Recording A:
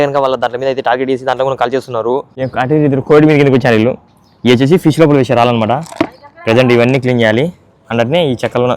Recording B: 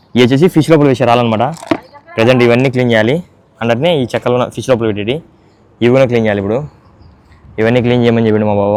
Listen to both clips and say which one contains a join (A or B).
A